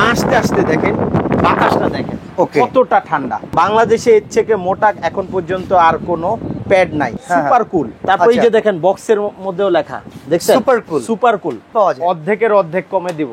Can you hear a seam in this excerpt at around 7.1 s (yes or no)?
yes